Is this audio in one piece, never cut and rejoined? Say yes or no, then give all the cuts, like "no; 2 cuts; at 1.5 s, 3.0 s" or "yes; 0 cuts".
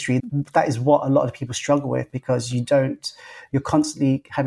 yes; 0 cuts